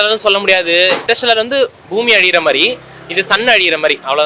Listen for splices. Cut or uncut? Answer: cut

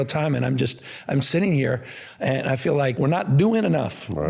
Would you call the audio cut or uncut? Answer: cut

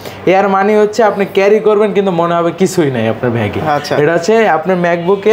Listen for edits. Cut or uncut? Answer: uncut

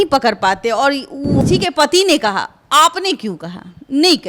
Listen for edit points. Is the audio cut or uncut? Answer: cut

